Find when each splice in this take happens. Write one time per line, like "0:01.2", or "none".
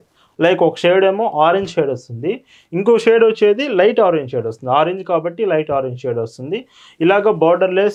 none